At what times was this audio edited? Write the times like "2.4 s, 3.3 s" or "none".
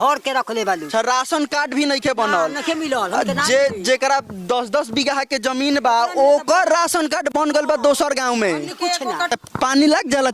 9.3 s